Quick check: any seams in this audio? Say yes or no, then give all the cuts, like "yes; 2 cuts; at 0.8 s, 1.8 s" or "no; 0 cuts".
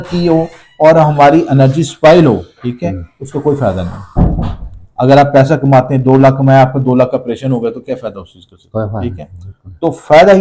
no; 0 cuts